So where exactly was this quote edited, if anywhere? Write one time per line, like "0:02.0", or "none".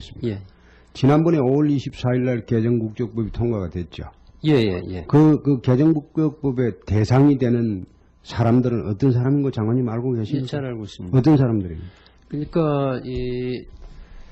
none

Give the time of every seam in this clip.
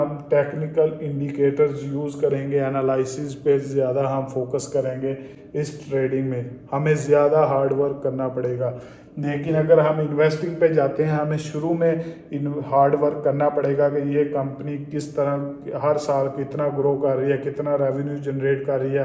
none

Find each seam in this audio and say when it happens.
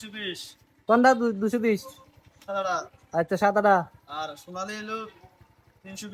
none

